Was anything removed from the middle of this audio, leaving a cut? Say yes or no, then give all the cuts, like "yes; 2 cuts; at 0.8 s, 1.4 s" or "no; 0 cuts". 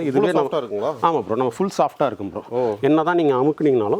no; 0 cuts